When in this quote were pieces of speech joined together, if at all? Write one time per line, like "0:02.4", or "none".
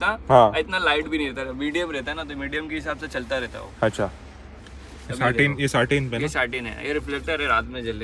none